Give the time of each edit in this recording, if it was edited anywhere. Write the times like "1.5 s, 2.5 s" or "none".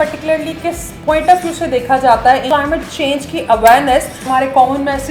2.4 s, 4.3 s